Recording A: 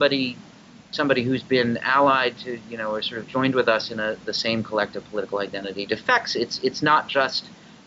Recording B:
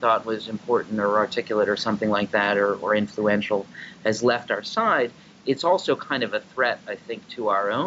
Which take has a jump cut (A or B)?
A